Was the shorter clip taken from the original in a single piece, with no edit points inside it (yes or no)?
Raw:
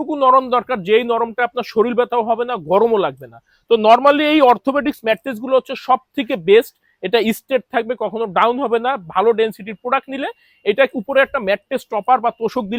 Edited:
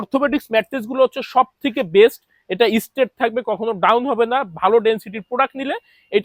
yes